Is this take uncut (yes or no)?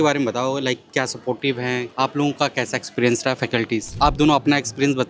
no